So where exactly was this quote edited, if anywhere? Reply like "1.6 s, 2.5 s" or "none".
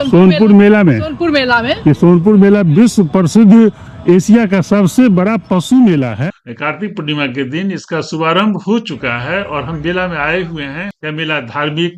6.3 s, 10.8 s

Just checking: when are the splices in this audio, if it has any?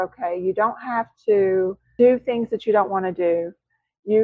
1.8 s

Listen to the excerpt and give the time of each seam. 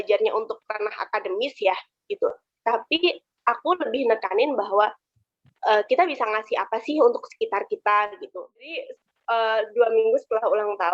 8.6 s

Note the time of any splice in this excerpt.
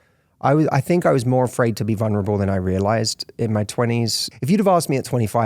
4.2 s

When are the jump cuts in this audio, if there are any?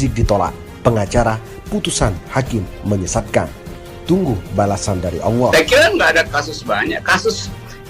5.4 s

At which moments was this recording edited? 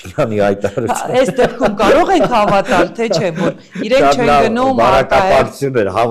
none

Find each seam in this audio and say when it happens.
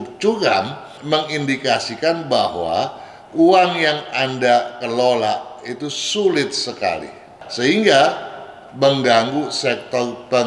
1.0 s

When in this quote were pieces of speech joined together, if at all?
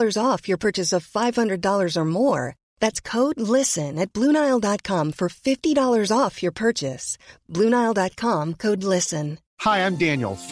9.5 s

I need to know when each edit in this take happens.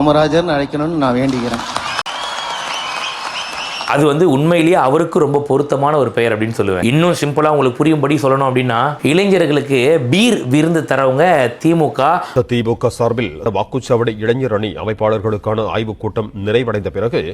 3.9 s, 6.8 s

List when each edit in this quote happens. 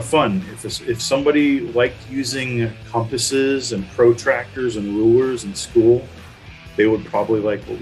none

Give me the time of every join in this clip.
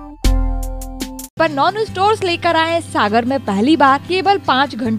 1.4 s, 4.0 s

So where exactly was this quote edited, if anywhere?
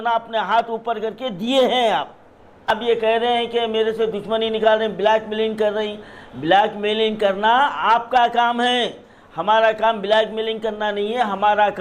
2.8 s

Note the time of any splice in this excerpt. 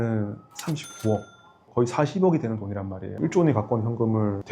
3.2 s

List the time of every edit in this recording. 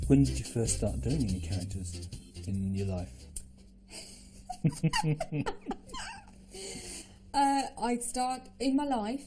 none

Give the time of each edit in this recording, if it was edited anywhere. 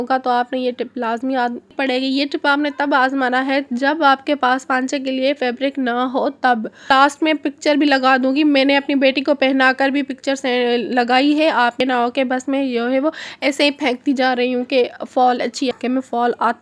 1.7 s, 6.9 s, 11.8 s, 15.7 s

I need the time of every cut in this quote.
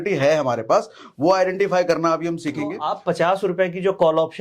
2.9 s

